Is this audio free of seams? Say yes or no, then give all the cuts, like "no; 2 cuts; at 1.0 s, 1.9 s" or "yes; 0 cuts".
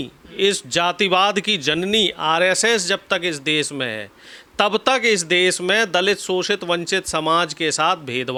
yes; 0 cuts